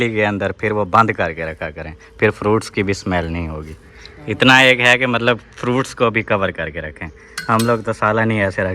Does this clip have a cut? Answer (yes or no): no